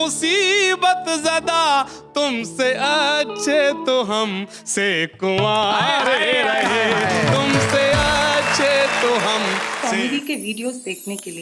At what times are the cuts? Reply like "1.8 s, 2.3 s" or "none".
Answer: 9.7 s